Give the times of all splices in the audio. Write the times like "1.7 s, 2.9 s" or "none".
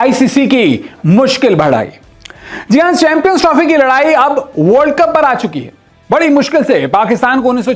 none